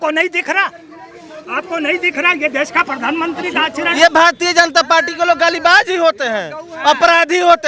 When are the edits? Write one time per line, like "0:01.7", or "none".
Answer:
0:03.9